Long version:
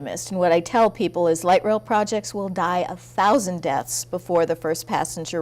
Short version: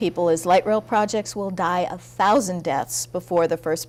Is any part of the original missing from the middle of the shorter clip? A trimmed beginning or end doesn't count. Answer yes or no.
no